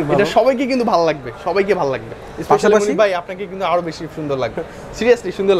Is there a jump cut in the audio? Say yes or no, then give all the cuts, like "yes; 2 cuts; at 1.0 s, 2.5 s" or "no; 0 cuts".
no; 0 cuts